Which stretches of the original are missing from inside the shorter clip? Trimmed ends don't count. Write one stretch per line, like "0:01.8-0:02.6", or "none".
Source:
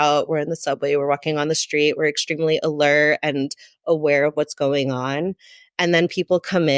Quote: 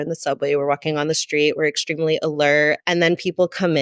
0:03.2-0:05.7